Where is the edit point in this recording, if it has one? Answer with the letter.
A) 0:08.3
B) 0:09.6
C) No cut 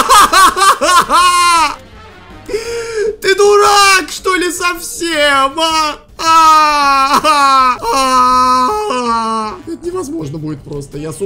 C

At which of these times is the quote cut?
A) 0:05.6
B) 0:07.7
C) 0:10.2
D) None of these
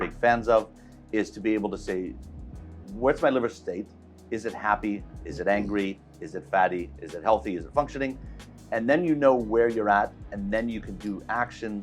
D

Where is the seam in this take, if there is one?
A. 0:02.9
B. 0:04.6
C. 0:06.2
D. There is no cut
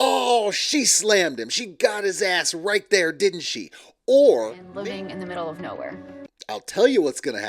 B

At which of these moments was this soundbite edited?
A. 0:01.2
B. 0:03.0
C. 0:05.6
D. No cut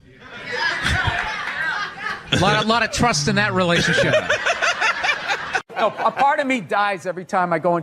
C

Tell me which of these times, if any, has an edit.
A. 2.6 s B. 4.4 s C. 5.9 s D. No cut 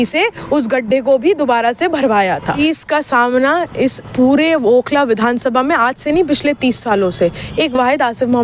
A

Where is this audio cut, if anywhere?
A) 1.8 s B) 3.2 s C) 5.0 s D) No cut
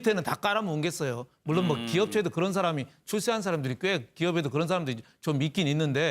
A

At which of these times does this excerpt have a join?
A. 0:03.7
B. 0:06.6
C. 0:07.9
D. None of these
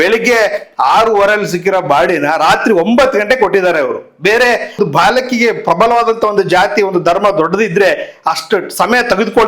D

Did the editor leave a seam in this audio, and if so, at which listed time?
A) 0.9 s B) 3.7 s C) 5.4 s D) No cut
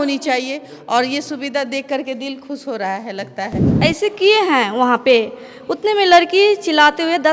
B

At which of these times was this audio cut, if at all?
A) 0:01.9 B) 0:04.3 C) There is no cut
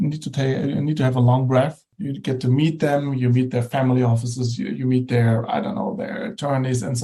A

